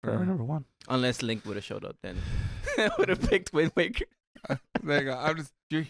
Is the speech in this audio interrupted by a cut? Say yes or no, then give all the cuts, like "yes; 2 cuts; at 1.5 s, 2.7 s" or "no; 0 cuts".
no; 0 cuts